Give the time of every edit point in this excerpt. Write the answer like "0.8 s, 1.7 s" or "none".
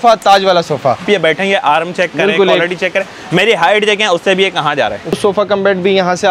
1.1 s, 5.1 s